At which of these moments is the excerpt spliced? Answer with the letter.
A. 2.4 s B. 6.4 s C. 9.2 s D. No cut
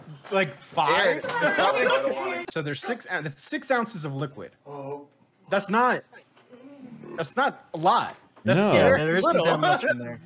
A